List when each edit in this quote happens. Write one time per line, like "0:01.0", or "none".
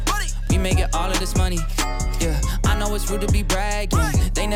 none